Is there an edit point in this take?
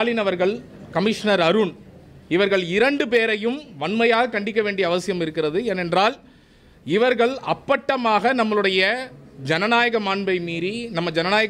no; 0 cuts

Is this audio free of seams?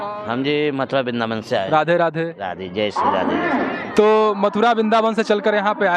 yes; 0 cuts

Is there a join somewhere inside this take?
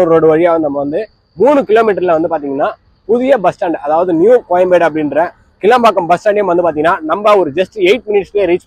no; 0 cuts

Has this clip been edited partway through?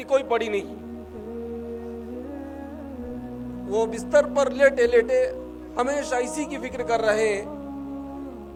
no; 0 cuts

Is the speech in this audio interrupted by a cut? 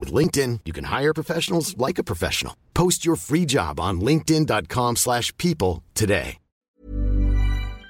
yes; 1 cut; at 6.8 s

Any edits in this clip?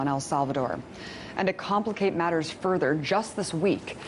yes; 1 cut; at 0.9 s

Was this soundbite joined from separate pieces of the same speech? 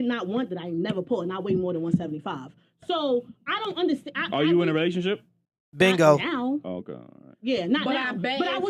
no; 0 cuts

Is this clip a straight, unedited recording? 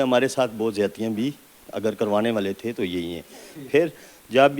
yes; 0 cuts

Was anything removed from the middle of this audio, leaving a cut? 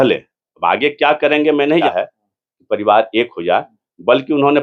yes; 1 cut; at 1.9 s

